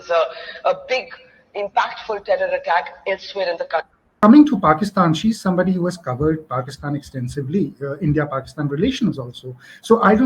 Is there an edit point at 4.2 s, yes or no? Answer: yes